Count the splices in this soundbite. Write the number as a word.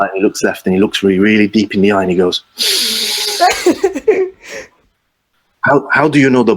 one